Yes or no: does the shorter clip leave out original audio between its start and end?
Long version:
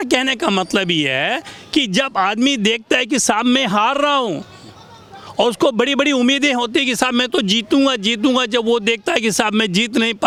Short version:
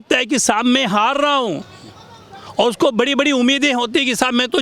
no